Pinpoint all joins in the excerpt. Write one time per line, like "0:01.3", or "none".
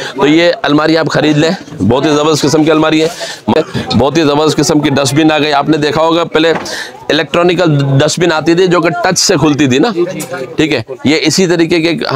0:03.6